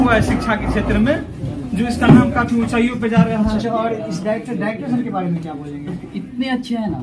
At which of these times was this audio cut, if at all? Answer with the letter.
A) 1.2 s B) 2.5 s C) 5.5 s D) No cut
D